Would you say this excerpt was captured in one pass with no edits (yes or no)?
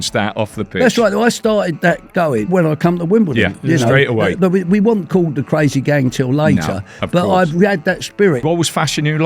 no